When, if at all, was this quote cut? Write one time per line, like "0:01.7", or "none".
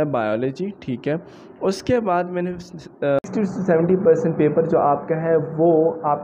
0:03.2